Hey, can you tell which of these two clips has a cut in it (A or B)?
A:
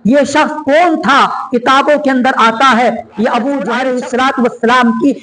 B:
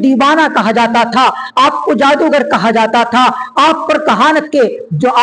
A